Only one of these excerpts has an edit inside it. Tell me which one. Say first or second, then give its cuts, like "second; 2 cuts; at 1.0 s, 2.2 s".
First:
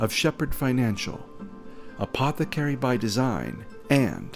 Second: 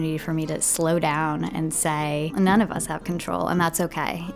second; 1 cut; at 2.3 s